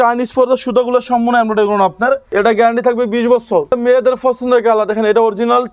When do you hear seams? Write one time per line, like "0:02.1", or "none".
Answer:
0:02.2
0:03.7